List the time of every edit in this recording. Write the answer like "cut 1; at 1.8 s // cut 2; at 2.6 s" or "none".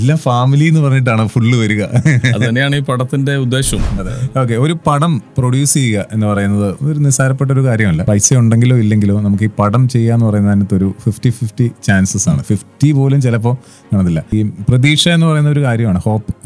cut 1; at 4.0 s // cut 2; at 8.0 s // cut 3; at 14.3 s

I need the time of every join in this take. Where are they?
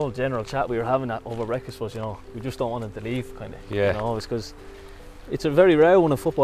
none

